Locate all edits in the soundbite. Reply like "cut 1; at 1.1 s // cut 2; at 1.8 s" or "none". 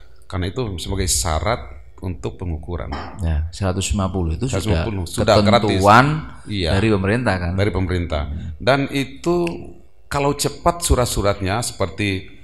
none